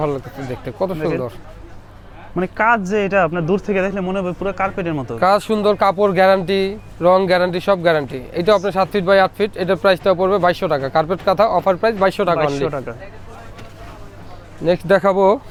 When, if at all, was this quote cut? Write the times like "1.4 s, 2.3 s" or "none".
none